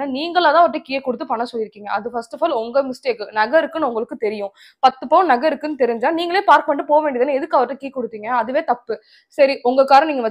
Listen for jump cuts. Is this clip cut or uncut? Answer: uncut